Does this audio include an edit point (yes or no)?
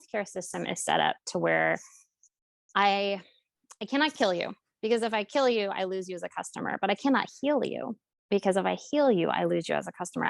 no